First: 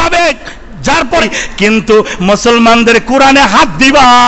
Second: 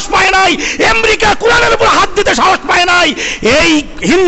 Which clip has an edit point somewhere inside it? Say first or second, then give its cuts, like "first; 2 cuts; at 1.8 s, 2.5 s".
first; 1 cut; at 1.2 s